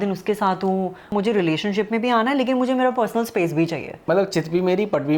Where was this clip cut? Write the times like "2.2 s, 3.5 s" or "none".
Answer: 1.1 s, 3.9 s